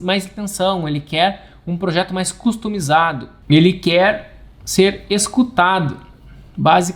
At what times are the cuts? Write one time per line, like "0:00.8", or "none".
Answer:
0:03.3